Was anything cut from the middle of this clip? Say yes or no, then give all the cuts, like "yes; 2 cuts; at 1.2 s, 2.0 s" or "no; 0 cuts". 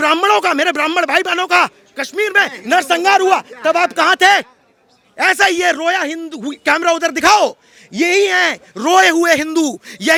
no; 0 cuts